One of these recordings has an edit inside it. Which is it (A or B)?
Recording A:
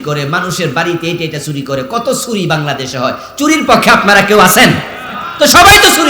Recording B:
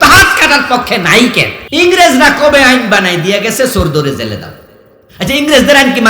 B